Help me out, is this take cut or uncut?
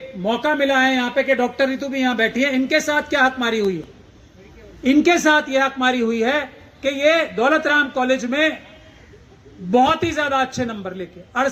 uncut